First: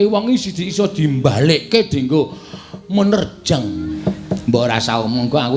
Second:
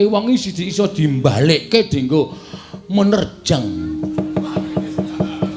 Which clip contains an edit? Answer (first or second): first